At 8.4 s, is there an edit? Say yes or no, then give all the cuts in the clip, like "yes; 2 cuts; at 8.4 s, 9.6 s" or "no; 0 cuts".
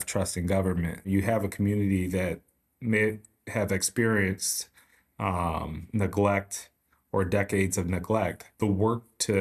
yes; 2 cuts; at 1.1 s, 8.4 s